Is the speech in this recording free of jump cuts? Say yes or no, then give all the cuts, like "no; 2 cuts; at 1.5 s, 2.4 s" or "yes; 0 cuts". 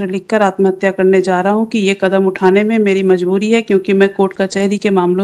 yes; 0 cuts